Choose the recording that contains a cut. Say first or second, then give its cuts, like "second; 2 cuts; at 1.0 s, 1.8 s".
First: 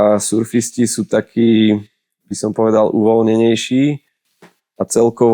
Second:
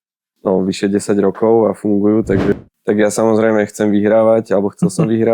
second; 1 cut; at 2.5 s